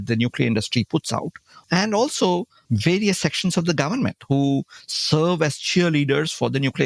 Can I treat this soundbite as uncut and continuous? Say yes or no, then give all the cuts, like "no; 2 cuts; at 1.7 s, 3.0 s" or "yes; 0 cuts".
no; 2 cuts; at 1.6 s, 2.6 s